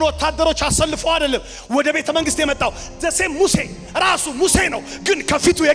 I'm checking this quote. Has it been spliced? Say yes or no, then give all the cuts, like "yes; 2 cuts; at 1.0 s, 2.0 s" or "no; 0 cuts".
no; 0 cuts